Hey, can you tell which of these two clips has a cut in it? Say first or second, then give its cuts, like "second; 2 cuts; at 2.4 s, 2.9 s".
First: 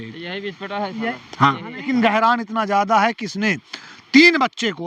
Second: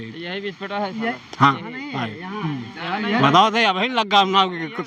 first; 1 cut; at 1.9 s